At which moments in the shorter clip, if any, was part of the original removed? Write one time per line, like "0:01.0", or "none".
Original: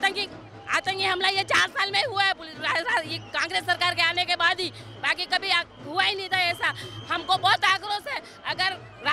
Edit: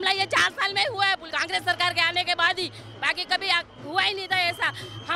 0:01.3